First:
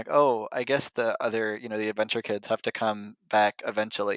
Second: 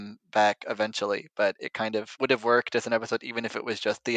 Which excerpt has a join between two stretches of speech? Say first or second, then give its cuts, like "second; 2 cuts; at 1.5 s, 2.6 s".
second; 1 cut; at 2.1 s